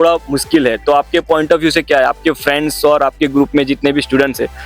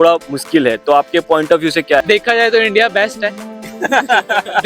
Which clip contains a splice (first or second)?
second